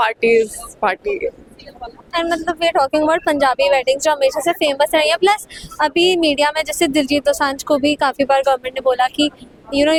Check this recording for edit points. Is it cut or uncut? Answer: uncut